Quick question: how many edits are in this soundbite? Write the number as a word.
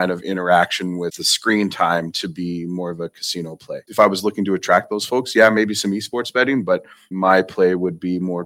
three